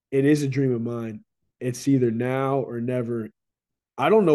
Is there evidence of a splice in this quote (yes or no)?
yes